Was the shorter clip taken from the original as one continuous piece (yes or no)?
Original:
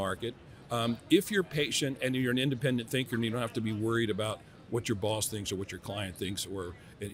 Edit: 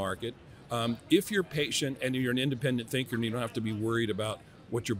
yes